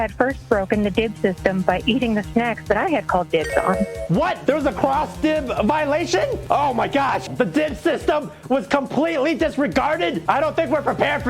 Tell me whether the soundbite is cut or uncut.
cut